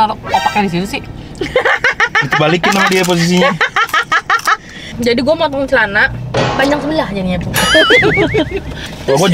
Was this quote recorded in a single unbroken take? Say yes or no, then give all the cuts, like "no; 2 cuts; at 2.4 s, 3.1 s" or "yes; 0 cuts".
no; 1 cut; at 5.0 s